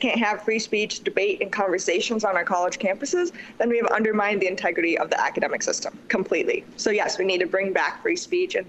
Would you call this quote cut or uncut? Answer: uncut